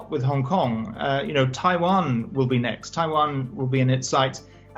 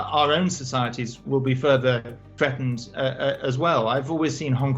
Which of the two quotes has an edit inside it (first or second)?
second